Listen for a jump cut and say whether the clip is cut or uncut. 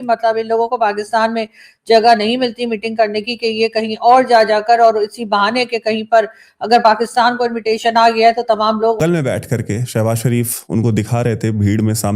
cut